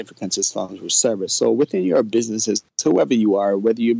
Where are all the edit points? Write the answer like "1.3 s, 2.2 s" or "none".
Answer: none